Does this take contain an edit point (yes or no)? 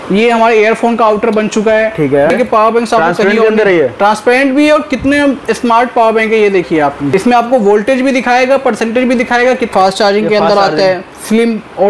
yes